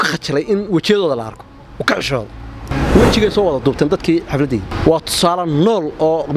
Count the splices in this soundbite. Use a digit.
2